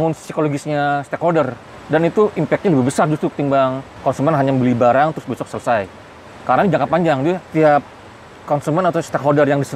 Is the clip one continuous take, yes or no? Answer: no